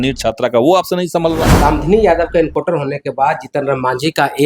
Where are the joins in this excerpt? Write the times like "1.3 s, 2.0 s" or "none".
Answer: 1.5 s